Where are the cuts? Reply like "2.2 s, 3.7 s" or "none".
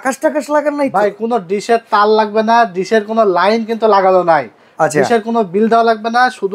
none